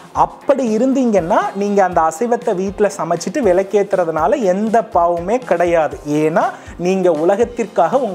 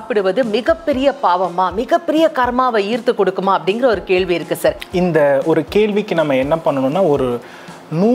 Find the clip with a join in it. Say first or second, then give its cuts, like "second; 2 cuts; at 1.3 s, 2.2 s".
second; 1 cut; at 4.8 s